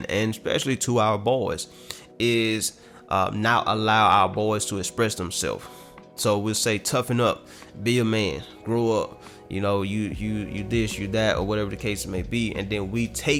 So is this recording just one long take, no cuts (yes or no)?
yes